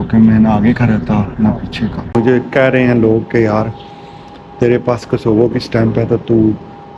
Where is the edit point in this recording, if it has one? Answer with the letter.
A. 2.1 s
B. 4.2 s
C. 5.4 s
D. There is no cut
A